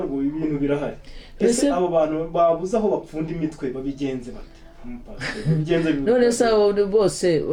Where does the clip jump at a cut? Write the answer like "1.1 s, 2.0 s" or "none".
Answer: none